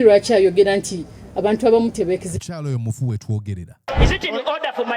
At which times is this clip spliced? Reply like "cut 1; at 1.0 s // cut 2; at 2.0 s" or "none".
cut 1; at 3.9 s